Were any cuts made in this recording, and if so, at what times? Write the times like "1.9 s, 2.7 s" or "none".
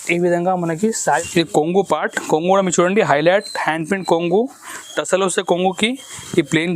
1.2 s